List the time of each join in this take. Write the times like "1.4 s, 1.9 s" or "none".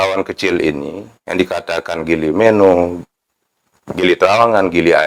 none